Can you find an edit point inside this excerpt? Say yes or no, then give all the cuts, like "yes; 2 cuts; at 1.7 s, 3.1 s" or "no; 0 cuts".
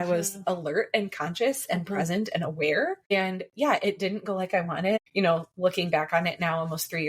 yes; 2 cuts; at 3.1 s, 5.0 s